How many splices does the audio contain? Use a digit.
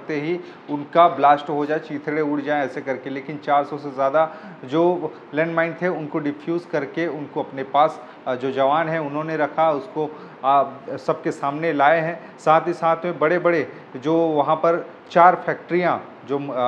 0